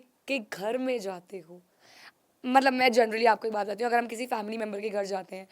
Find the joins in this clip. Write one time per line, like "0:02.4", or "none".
none